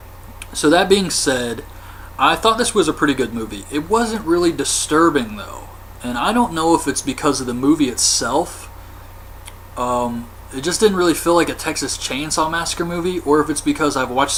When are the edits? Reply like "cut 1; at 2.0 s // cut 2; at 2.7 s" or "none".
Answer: none